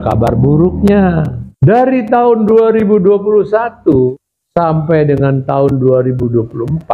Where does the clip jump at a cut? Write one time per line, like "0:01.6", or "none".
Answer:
0:01.4
0:04.3